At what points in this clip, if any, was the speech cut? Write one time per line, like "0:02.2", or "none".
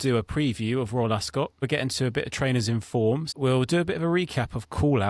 0:01.7
0:03.3